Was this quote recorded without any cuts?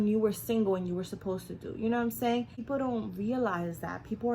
no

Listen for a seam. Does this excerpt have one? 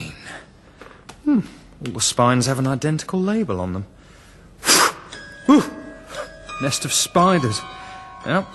no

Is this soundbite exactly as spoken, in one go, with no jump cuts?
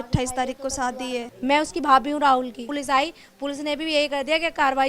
no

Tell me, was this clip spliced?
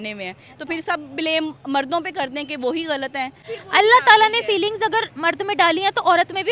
yes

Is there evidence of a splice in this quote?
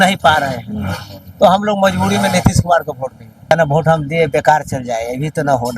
yes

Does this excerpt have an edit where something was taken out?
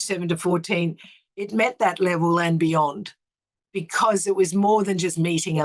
no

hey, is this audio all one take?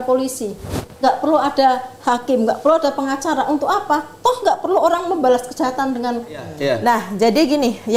no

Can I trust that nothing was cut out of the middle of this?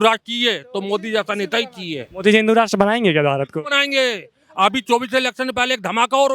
yes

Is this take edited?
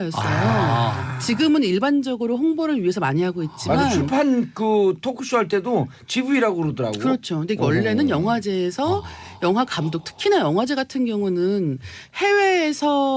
no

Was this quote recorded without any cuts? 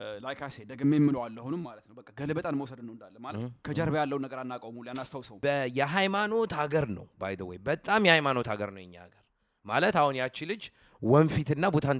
no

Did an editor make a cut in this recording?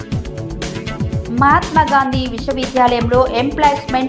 yes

